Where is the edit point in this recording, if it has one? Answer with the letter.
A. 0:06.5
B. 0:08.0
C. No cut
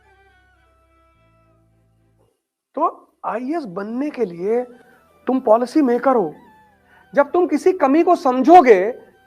C